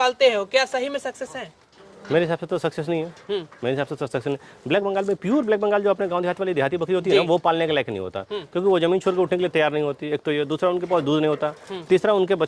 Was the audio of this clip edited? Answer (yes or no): no